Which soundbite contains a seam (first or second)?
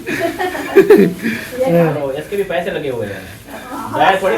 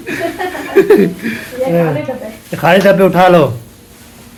first